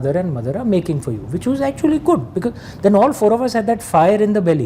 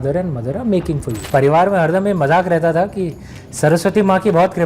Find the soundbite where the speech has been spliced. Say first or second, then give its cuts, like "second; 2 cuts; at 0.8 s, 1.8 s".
second; 1 cut; at 1.2 s